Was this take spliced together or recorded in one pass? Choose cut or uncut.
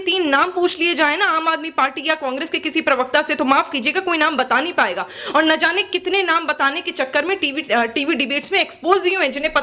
uncut